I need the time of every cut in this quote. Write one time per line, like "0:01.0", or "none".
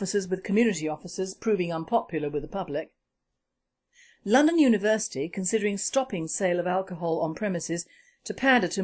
0:02.8